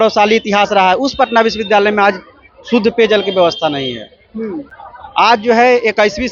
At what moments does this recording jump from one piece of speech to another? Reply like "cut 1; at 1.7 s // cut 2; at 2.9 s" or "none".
none